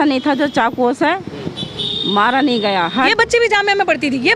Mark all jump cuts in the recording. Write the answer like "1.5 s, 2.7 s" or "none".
3.1 s